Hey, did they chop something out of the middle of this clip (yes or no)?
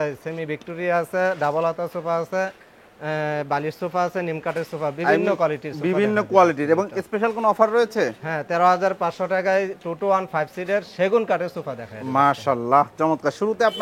no